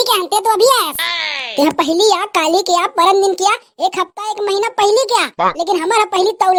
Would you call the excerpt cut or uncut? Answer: uncut